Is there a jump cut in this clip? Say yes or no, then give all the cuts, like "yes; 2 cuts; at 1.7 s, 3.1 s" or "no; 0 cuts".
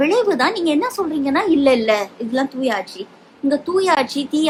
no; 0 cuts